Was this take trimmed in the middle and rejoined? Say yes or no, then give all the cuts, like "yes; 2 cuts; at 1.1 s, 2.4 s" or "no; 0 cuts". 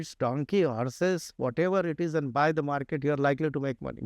no; 0 cuts